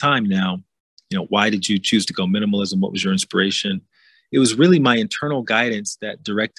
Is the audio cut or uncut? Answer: uncut